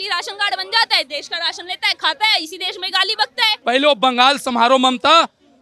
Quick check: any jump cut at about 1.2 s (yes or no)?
no